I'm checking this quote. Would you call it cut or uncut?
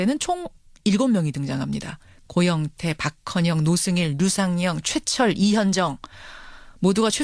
uncut